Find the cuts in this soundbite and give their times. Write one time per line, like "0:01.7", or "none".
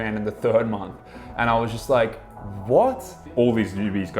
0:03.3